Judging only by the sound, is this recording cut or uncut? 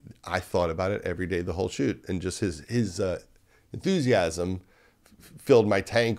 uncut